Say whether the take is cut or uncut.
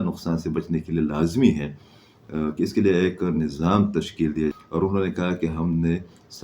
cut